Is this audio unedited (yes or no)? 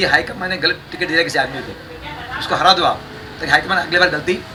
yes